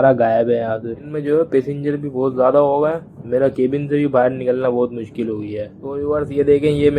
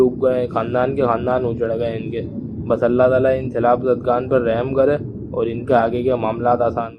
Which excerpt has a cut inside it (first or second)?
first